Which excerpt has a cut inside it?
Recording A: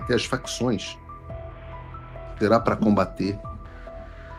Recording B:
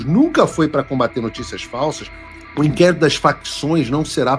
B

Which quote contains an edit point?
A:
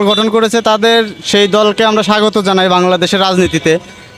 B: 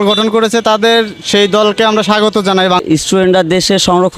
B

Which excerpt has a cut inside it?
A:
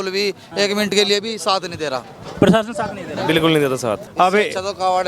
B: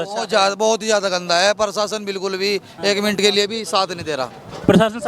A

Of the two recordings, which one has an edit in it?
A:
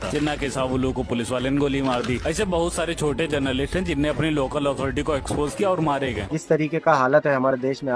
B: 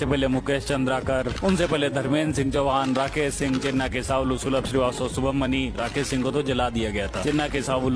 A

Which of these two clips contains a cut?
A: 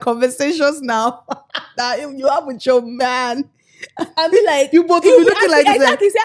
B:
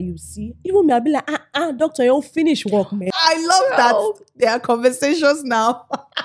B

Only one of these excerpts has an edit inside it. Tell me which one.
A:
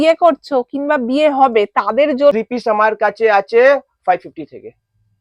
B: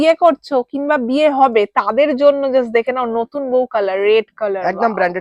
A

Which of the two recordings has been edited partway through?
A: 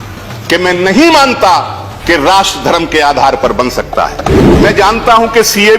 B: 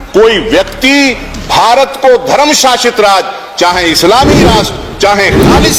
A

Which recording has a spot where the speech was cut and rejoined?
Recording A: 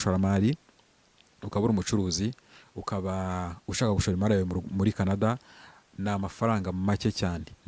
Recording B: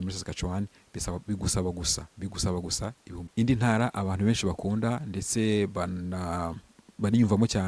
B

